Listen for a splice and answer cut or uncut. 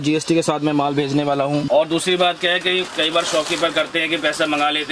cut